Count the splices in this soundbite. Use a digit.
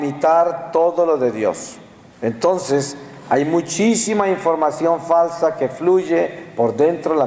1